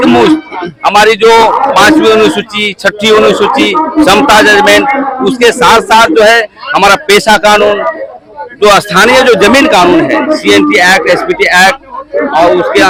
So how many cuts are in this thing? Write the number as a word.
zero